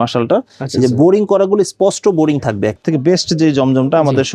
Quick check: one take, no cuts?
no; 1 cut; at 2.8 s

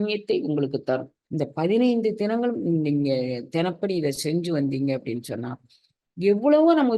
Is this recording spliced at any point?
yes; 1 cut; at 1.2 s

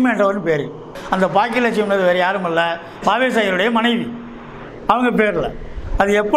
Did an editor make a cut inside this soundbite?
yes; 1 cut; at 1.0 s

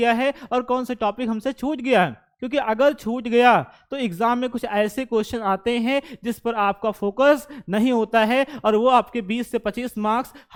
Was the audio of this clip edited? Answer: no; 0 cuts

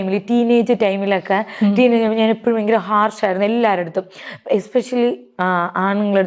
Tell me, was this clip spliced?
no; 0 cuts

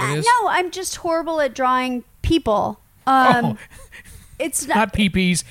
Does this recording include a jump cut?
no; 0 cuts

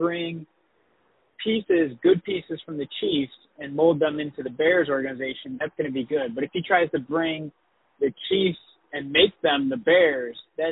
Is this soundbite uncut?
yes; 0 cuts

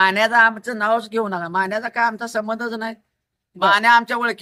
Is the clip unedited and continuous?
yes; 0 cuts

